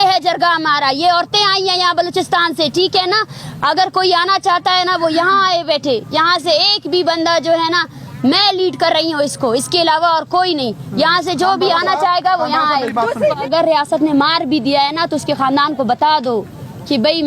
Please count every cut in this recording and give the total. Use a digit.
1